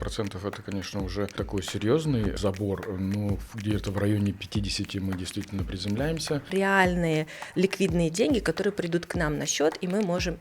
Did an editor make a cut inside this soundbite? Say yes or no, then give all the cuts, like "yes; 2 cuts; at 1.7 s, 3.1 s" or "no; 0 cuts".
yes; 3 cuts; at 1.3 s, 2.4 s, 6.5 s